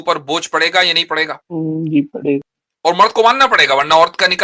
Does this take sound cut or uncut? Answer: cut